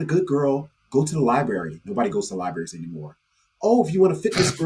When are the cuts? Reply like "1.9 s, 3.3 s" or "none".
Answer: none